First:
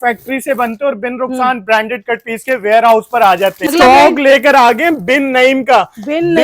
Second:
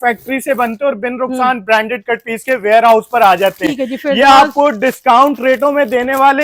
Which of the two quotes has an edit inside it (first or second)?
first